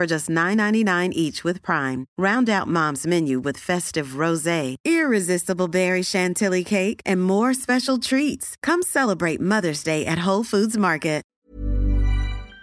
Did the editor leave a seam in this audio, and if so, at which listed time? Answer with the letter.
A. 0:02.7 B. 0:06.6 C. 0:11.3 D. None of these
C